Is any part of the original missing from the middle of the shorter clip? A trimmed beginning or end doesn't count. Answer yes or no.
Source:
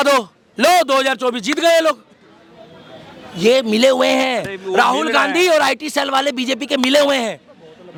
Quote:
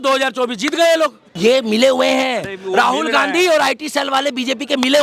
yes